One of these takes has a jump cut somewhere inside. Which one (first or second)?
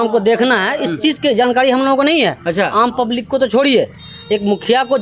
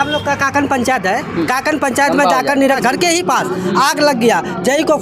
second